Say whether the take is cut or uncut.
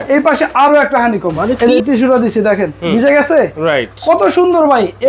cut